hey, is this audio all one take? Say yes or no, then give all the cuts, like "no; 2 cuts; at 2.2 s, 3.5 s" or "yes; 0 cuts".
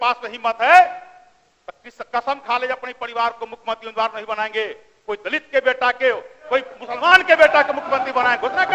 yes; 0 cuts